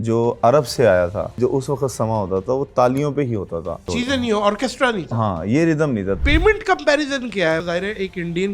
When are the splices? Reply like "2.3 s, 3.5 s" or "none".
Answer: 1.4 s, 3.9 s, 6.2 s, 7.6 s